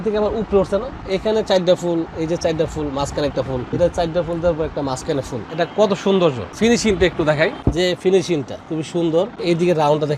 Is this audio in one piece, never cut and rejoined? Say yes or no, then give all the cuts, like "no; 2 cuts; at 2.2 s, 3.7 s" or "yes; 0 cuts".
no; 7 cuts; at 1.0 s, 3.7 s, 5.4 s, 6.5 s, 7.6 s, 8.6 s, 9.4 s